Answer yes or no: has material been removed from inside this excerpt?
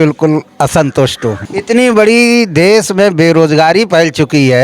yes